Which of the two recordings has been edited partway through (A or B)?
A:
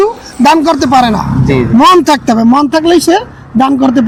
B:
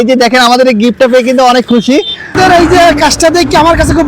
B